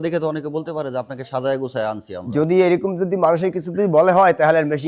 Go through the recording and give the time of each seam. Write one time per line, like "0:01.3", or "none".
none